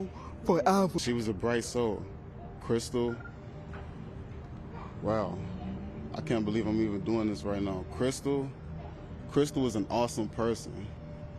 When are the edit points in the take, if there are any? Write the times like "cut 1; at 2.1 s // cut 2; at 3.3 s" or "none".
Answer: cut 1; at 1.0 s